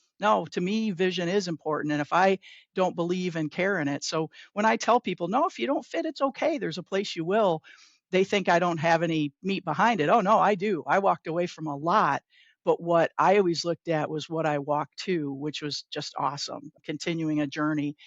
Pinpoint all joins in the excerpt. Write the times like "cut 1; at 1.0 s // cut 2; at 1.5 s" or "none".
cut 1; at 16.8 s